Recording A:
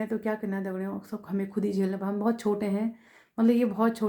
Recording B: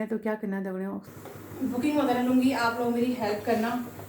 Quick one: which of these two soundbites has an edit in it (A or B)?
B